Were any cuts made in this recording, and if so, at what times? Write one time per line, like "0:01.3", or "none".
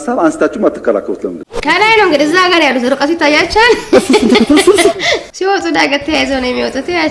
0:01.5
0:05.2